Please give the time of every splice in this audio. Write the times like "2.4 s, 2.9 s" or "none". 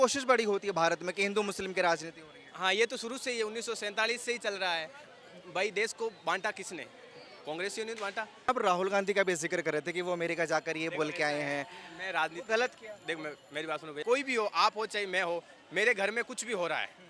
8.5 s, 14.0 s